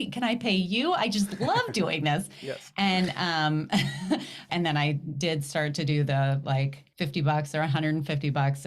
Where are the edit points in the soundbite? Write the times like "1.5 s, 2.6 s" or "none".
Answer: 4.4 s, 6.8 s